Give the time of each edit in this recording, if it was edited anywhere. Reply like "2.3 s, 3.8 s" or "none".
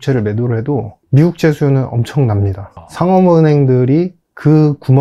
1.0 s, 2.8 s